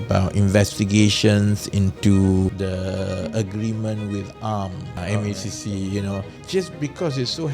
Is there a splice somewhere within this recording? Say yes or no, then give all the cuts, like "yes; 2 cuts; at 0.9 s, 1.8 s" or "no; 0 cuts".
yes; 3 cuts; at 2.6 s, 5.0 s, 6.3 s